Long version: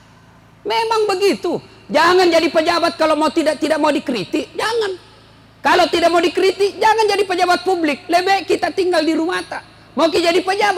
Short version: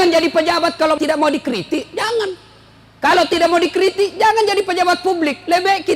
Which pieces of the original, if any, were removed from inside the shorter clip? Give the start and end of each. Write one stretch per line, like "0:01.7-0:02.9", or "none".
0:03.2-0:03.6